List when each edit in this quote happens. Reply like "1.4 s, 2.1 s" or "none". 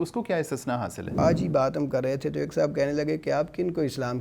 1.2 s